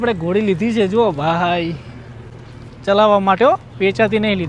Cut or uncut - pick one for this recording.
uncut